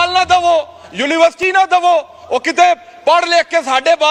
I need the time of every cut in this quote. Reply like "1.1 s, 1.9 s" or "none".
none